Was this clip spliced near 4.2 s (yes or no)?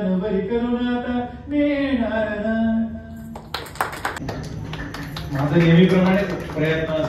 yes